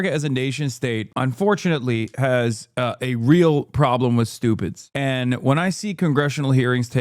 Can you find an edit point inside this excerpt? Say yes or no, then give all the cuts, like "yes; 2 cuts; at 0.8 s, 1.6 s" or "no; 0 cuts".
yes; 1 cut; at 4.9 s